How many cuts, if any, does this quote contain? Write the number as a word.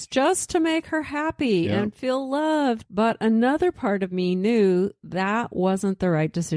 one